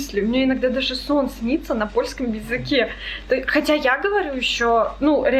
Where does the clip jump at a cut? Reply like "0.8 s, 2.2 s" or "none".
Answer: none